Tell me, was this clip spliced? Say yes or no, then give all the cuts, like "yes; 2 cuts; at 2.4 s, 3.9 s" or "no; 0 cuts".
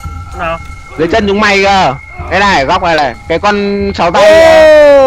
yes; 1 cut; at 3.2 s